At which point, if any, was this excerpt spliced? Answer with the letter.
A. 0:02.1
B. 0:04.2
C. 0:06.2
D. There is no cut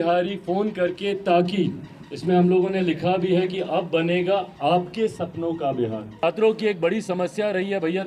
C